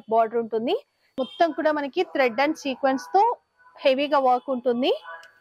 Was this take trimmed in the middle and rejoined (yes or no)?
yes